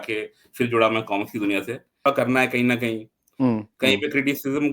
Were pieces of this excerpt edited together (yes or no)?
yes